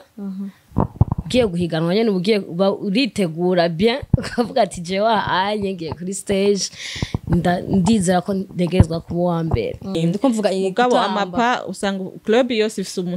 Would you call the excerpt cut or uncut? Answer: cut